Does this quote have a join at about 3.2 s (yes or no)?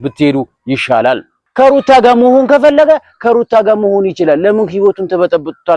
no